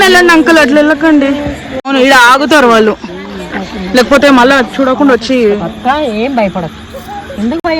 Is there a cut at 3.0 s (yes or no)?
no